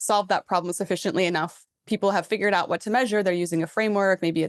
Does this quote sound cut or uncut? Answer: uncut